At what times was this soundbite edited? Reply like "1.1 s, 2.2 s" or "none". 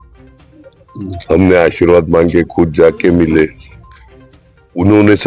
none